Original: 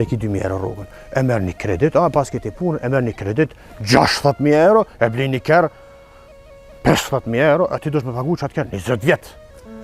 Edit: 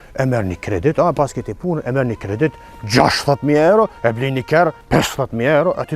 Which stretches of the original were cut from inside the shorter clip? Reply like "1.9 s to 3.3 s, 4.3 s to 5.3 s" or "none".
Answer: 5.8 s to 6.7 s